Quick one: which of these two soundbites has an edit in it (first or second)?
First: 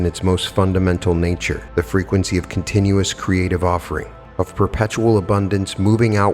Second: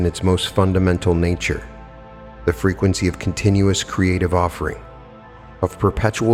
first